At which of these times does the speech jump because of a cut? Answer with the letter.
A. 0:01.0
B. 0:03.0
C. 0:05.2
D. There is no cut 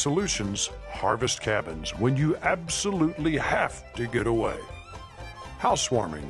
D